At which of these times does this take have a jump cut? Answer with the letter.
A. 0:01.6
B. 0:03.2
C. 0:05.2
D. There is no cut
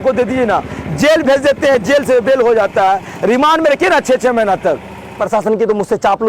C